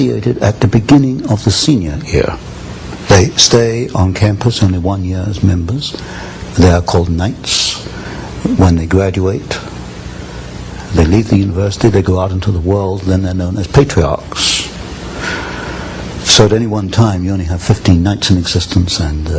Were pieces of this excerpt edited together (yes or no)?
no